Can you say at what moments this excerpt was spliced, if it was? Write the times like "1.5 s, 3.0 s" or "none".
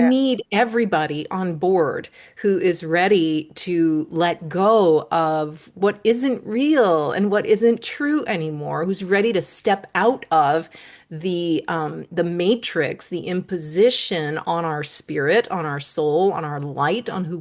none